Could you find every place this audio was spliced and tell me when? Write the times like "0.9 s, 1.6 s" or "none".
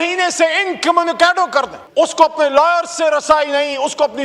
1.8 s